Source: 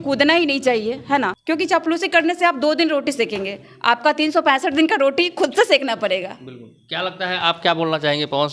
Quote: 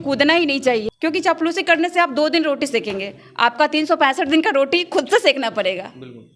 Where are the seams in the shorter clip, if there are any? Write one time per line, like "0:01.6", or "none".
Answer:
0:00.9